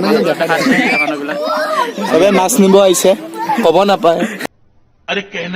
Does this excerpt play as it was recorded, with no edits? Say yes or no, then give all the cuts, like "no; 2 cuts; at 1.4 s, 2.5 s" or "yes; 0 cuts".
no; 1 cut; at 4.4 s